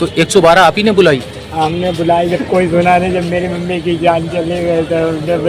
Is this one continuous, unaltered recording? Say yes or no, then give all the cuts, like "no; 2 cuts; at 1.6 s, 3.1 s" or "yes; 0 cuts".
yes; 0 cuts